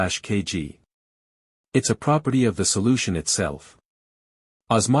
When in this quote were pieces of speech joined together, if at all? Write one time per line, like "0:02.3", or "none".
0:03.3